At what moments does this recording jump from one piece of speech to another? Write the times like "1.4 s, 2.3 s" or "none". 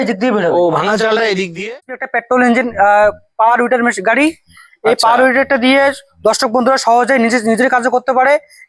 1.9 s